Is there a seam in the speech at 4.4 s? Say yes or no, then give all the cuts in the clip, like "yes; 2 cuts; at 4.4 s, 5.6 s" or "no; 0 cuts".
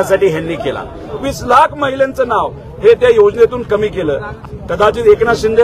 yes; 2 cuts; at 1.3 s, 4.4 s